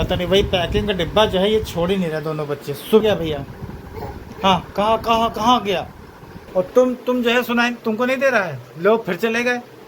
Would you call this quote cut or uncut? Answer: cut